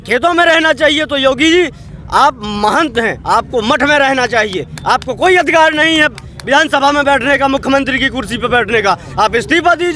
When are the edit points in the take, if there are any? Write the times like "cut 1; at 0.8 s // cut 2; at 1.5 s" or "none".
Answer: none

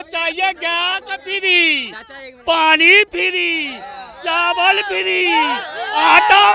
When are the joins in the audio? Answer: none

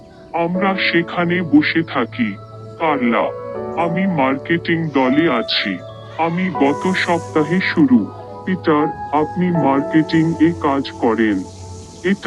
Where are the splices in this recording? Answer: none

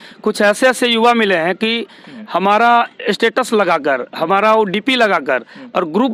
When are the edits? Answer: none

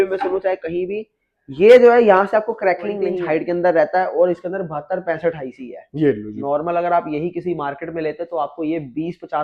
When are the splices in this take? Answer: cut 1; at 3.2 s

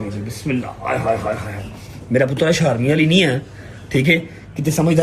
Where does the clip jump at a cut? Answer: none

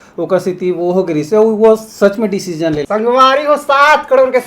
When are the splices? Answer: cut 1; at 2.8 s

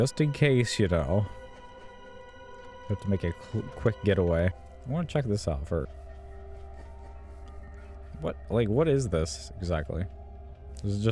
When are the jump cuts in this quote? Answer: cut 1; at 4.7 s // cut 2; at 5.9 s

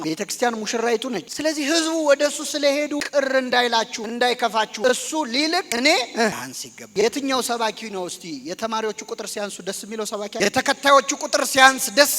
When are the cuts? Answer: cut 1; at 6.9 s

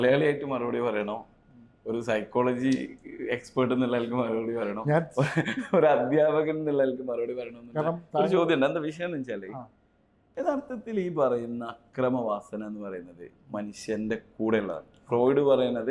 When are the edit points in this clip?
none

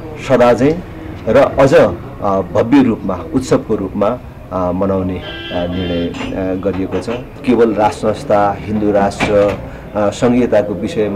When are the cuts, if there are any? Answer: cut 1; at 7.2 s

